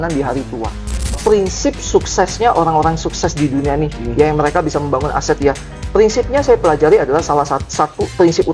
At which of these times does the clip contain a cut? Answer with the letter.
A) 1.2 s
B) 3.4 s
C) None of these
A